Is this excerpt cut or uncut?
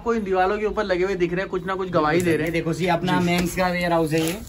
uncut